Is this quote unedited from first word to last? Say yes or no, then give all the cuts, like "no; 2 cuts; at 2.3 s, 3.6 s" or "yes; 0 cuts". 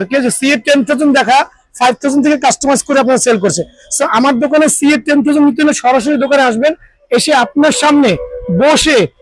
yes; 0 cuts